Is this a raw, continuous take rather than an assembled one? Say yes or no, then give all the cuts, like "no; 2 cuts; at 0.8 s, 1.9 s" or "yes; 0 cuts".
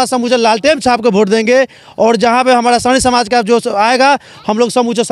yes; 0 cuts